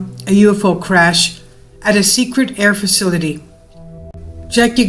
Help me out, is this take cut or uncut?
uncut